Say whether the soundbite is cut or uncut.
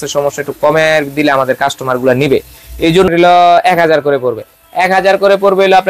cut